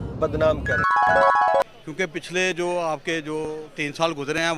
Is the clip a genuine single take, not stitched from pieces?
no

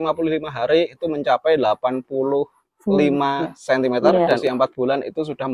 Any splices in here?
yes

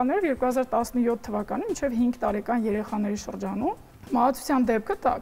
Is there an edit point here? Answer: no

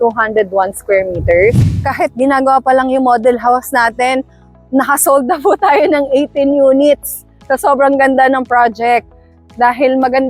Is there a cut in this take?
yes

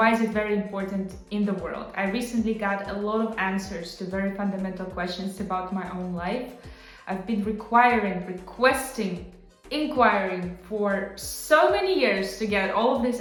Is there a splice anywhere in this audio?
no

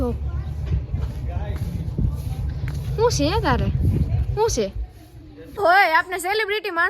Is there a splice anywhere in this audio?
yes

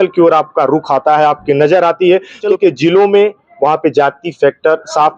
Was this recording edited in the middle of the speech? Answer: yes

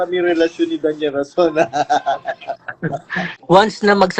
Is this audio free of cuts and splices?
no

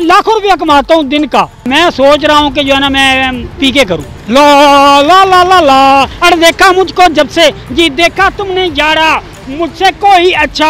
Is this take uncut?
no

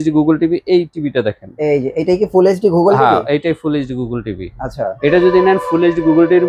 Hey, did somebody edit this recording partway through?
no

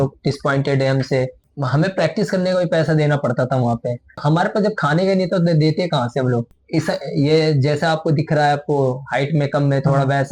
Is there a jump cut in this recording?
yes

